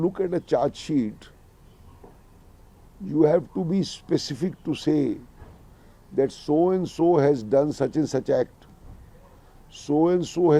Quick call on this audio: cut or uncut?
uncut